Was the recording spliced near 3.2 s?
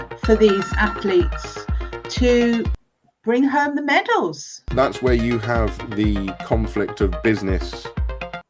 no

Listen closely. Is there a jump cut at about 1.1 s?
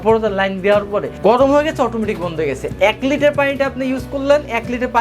yes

